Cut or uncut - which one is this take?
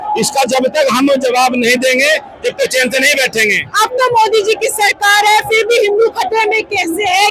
uncut